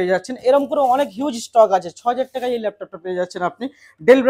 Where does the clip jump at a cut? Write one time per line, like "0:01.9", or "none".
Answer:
none